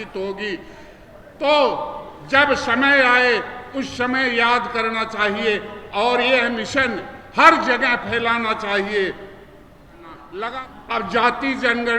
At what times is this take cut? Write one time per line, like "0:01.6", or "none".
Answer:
0:10.5